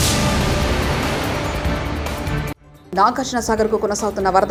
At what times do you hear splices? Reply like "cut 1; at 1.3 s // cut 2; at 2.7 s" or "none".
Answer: none